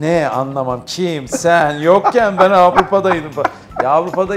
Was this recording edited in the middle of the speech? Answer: no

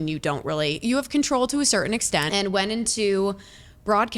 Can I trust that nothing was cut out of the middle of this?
no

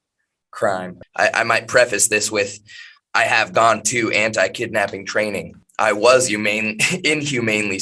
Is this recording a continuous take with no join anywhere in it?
no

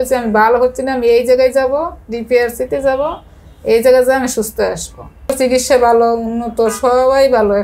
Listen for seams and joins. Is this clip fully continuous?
yes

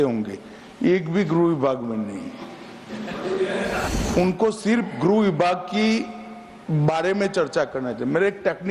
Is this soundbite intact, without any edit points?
no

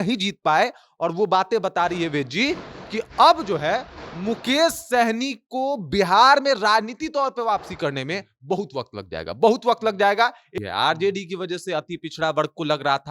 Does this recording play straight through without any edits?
no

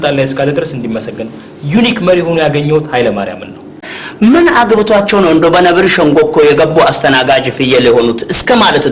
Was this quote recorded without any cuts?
no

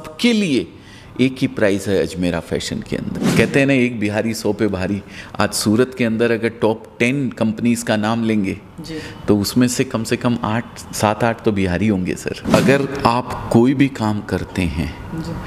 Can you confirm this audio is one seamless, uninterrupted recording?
no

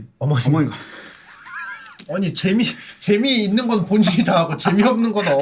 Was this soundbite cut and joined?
no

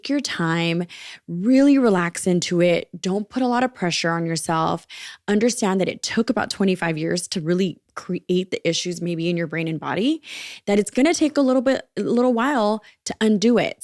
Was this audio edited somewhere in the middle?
no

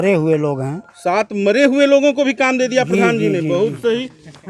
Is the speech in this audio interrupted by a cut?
no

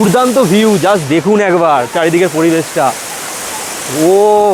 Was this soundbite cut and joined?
no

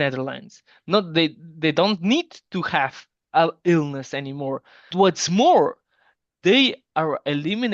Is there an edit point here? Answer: yes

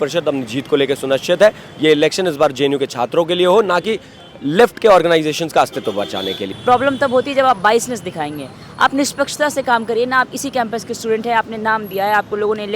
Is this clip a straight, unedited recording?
no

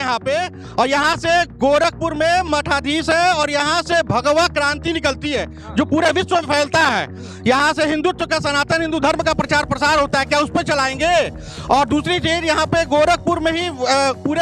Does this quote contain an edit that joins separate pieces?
no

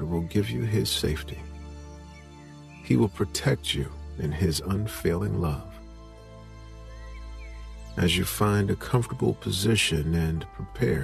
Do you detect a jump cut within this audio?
no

